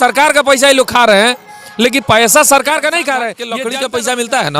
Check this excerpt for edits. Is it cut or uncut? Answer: cut